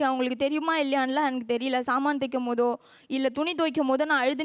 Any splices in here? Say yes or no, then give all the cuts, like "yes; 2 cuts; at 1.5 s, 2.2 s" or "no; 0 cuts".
no; 0 cuts